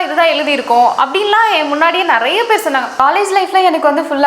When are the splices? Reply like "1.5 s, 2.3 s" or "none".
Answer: 2.9 s